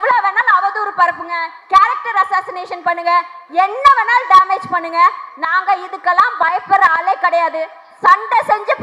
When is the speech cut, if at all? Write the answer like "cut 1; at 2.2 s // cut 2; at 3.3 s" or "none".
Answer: none